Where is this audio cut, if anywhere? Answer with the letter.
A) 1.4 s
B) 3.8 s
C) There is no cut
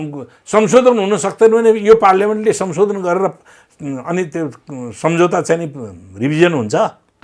C